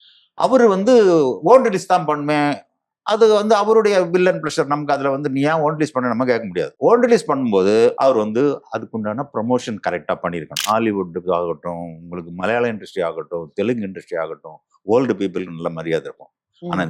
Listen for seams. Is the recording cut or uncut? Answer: cut